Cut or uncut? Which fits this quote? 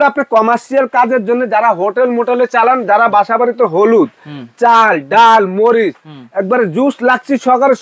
uncut